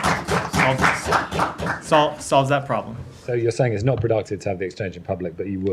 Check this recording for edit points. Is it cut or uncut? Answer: cut